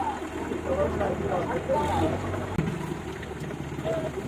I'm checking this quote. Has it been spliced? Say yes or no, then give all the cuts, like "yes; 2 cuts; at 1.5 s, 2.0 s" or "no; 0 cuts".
yes; 1 cut; at 2.6 s